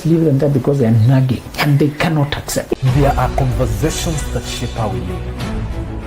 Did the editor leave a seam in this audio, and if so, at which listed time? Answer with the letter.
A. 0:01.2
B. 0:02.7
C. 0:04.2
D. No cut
B